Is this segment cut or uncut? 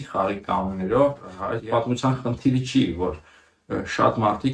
cut